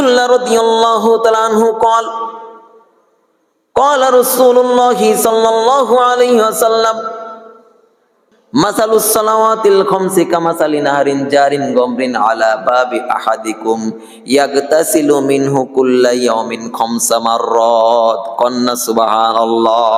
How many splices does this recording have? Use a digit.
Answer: 0